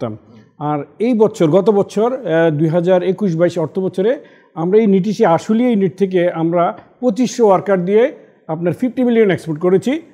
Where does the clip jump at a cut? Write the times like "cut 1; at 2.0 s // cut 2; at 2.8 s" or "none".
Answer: none